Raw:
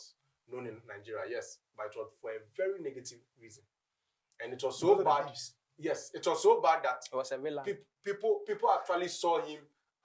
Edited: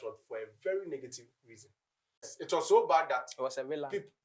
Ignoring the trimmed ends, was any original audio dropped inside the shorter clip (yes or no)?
yes